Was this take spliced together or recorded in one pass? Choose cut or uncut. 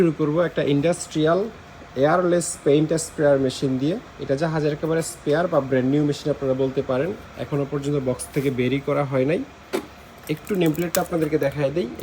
uncut